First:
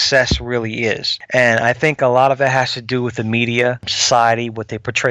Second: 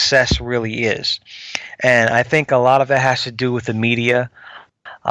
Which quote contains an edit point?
first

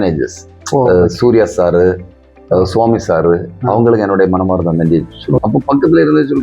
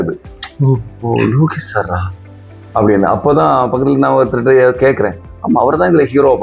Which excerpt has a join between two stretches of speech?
first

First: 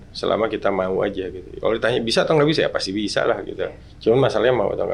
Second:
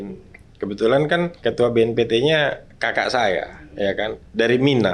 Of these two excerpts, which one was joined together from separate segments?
second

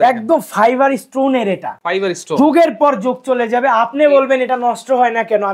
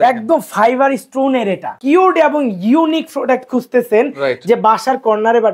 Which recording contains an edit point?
second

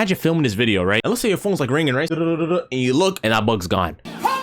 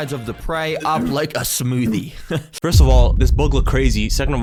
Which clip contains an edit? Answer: first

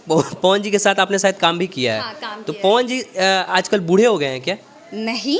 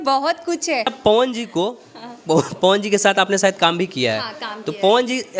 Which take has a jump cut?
second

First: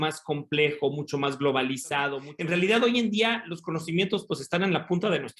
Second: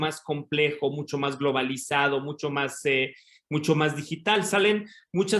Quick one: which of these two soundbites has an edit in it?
first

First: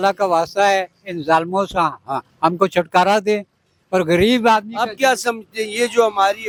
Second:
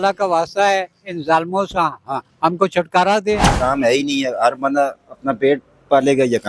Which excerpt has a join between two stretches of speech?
second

